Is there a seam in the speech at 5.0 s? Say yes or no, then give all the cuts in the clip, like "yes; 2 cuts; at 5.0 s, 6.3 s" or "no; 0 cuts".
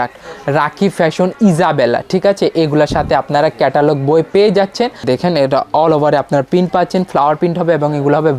yes; 1 cut; at 5.0 s